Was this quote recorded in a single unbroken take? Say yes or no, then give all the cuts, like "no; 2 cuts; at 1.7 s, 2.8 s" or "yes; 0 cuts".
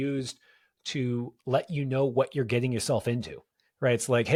yes; 0 cuts